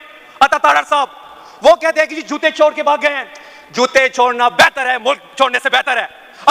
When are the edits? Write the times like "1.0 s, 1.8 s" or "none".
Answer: none